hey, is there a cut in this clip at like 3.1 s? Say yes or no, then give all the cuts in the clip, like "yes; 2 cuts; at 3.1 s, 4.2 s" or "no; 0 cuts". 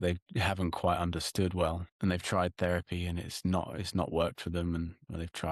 no; 1 cut; at 1.9 s